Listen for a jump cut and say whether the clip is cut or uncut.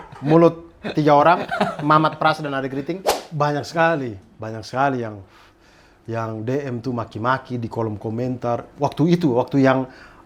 cut